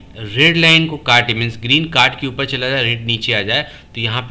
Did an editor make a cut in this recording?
no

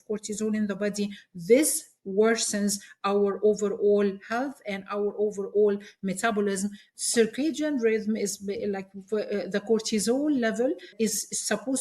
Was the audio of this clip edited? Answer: yes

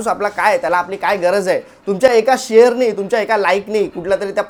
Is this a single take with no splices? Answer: yes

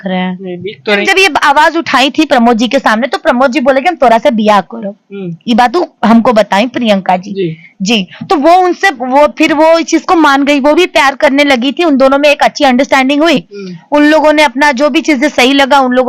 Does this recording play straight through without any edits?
no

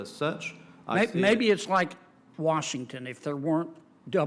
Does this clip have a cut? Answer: no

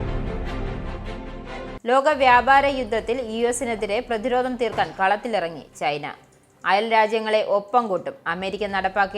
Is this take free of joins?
no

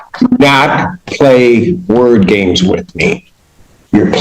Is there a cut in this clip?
no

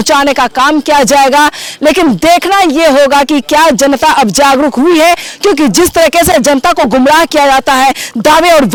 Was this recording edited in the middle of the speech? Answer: no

